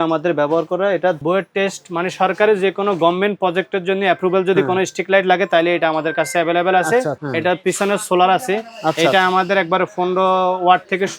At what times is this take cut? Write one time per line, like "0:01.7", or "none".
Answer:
0:01.2
0:07.2